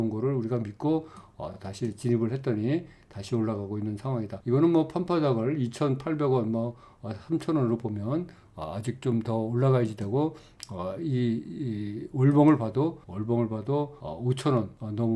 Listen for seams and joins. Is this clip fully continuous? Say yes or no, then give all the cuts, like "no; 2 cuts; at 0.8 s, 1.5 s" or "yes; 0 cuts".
yes; 0 cuts